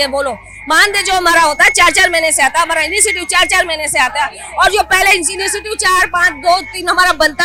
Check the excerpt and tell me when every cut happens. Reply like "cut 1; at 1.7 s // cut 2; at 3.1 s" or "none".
none